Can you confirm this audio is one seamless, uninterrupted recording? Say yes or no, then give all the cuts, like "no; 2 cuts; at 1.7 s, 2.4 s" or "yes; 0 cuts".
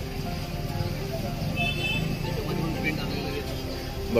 yes; 0 cuts